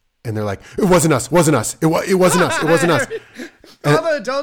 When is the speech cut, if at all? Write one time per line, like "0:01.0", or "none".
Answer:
none